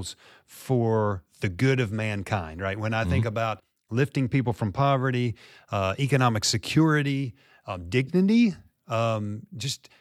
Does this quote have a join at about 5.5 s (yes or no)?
no